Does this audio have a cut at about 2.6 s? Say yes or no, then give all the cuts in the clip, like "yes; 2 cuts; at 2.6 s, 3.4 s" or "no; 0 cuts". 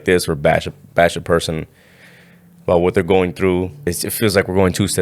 no; 1 cut; at 3.8 s